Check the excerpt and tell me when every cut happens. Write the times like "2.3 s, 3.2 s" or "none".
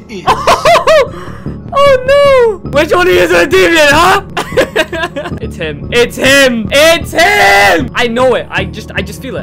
2.6 s, 4.3 s, 5.4 s, 6.7 s, 7.9 s

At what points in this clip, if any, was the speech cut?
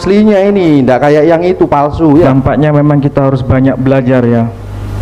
2.3 s

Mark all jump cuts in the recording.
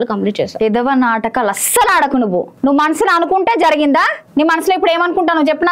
2.5 s, 4.2 s

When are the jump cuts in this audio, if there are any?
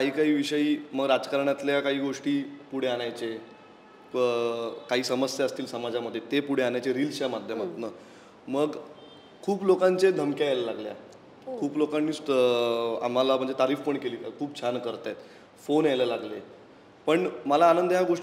none

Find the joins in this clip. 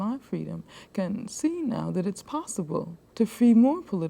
3.0 s

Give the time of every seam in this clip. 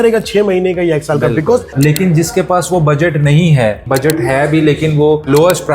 1.7 s, 3.8 s

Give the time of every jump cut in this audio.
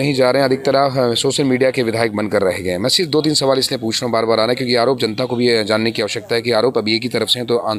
none

